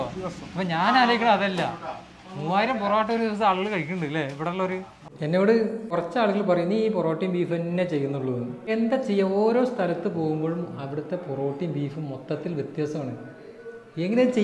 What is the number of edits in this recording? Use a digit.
3